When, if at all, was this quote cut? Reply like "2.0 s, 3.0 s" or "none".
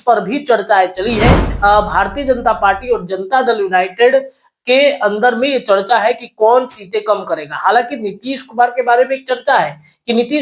1.5 s